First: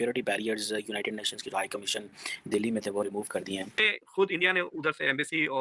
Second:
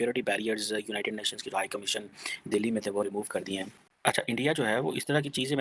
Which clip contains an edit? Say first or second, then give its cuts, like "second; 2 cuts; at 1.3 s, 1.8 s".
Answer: first; 1 cut; at 3.9 s